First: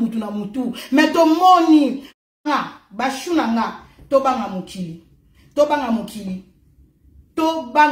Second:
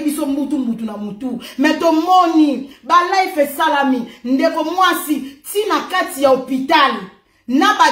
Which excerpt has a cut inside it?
first; 1 cut; at 2.0 s

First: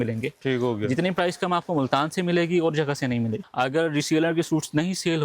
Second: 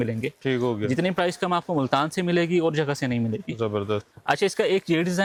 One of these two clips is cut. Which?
first; 1 cut; at 3.4 s

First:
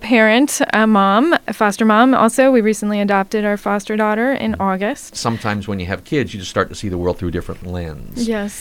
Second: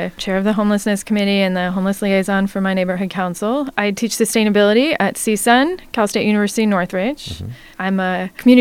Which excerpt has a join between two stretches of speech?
first; 3 cuts; at 1.4 s, 5.2 s, 7.6 s

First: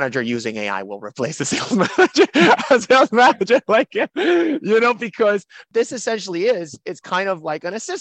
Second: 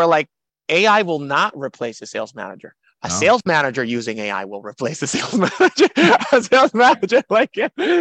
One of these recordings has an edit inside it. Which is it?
first; 1 cut; at 5.6 s

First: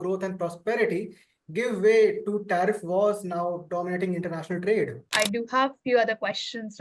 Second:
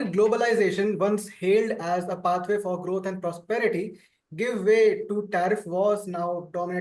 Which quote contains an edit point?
first; 1 cut; at 5.0 s

